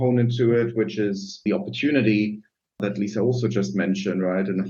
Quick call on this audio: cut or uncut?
cut